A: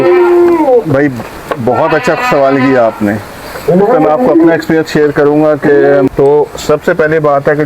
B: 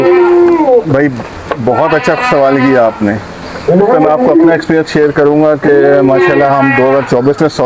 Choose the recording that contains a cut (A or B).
A